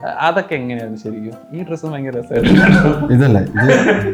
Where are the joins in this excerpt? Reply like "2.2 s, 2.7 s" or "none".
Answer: none